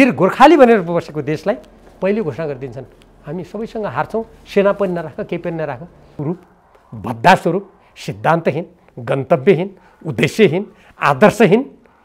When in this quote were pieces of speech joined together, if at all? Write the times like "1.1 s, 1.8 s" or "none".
6.1 s

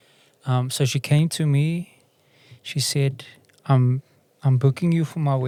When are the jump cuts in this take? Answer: none

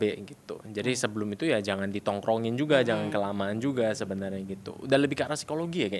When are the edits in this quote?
none

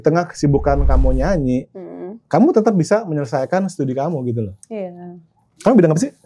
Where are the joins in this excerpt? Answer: none

